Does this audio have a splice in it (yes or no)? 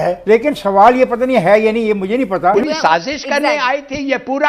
yes